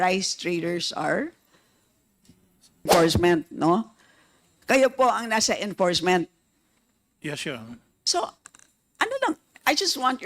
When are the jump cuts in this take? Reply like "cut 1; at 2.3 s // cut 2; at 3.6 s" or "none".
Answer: cut 1; at 2.9 s